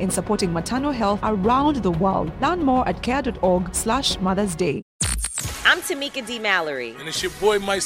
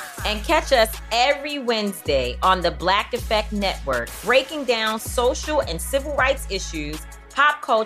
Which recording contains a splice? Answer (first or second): first